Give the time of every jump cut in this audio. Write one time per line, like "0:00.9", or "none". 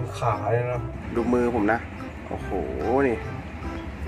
0:01.0